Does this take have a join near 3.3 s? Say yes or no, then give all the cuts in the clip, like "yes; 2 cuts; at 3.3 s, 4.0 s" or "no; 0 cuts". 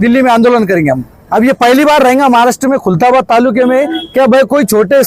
no; 1 cut; at 1.1 s